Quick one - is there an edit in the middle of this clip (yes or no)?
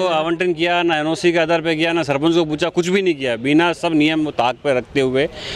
no